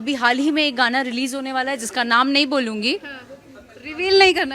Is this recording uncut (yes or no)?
yes